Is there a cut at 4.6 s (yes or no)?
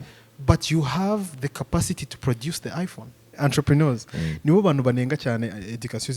no